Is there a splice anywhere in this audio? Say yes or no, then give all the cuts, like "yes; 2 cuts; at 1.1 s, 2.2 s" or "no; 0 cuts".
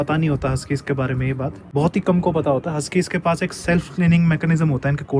yes; 1 cut; at 1.6 s